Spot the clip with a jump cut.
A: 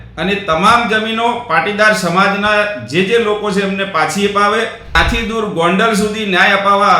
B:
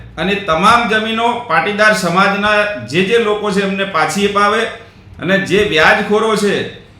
A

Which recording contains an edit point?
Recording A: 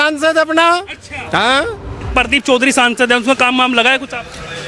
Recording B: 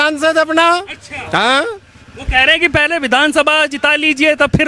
A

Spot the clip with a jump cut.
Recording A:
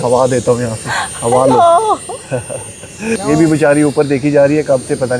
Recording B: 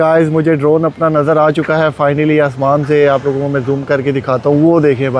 A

